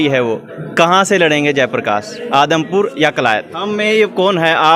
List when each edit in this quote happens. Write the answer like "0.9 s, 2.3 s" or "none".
3.6 s